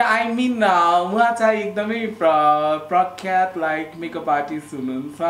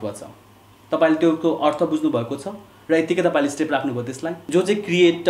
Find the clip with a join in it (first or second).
second